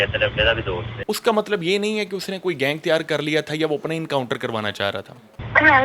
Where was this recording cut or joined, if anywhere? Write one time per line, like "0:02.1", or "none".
0:00.9